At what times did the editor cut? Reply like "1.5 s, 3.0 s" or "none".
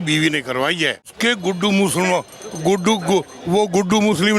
1.1 s